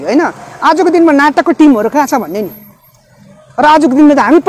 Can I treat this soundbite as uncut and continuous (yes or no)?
yes